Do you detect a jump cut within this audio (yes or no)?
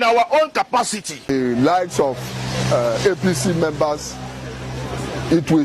yes